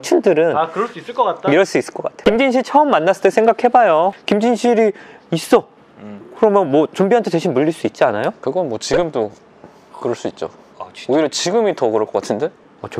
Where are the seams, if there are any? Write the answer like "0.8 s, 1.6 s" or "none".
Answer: none